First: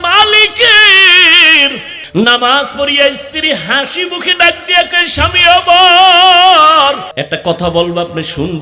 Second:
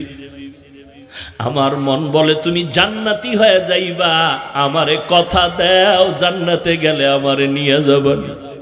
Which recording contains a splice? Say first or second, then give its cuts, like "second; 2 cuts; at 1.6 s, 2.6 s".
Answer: first; 2 cuts; at 1.9 s, 7.1 s